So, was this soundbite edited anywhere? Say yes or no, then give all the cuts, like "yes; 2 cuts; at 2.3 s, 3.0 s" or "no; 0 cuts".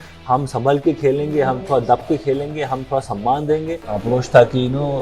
yes; 1 cut; at 3.8 s